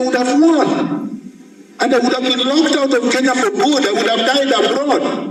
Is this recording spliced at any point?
no; 0 cuts

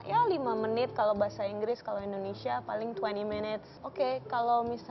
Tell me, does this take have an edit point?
yes; 1 cut; at 3.8 s

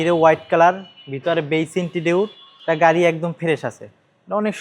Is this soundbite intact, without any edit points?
no; 1 cut; at 2.5 s

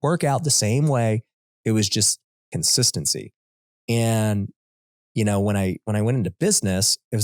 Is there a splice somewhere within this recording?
no; 0 cuts

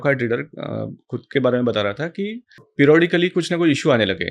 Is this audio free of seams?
no; 1 cut; at 2.7 s

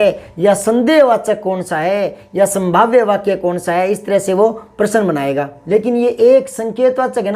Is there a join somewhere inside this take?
yes; 1 cut; at 5.5 s

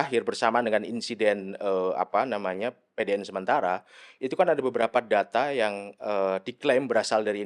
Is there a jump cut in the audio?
no; 0 cuts

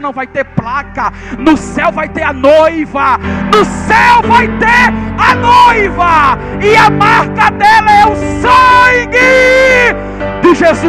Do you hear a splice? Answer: no; 0 cuts

